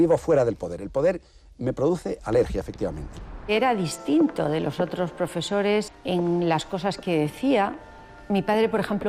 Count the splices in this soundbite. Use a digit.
2